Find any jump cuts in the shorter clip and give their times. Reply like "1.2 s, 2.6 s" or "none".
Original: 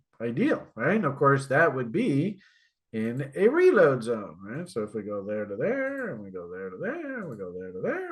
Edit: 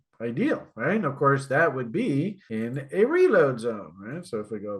2.4 s